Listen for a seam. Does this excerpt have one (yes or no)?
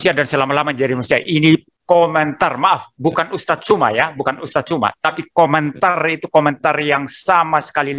no